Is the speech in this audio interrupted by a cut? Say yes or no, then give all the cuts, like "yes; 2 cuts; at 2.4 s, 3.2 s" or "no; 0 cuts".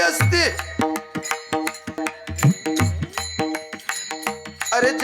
yes; 1 cut; at 2.0 s